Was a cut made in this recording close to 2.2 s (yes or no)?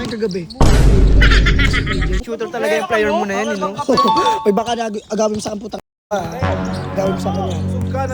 yes